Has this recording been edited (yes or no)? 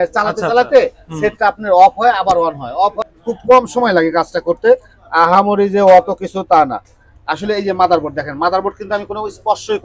yes